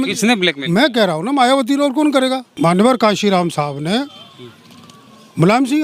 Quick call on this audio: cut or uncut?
cut